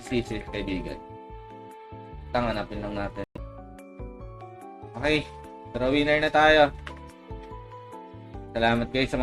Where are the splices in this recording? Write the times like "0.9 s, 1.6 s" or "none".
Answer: 3.4 s

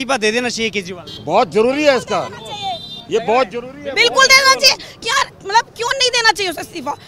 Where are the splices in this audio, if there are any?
none

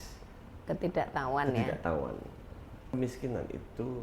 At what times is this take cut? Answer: 2.7 s

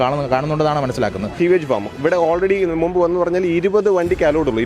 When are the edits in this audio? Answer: 1.3 s

